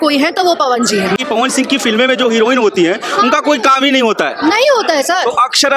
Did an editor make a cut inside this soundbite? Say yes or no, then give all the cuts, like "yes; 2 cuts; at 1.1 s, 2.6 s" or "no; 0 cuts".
yes; 1 cut; at 1.2 s